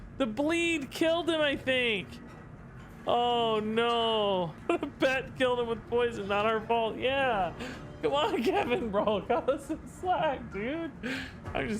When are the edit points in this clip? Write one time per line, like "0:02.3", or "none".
0:04.6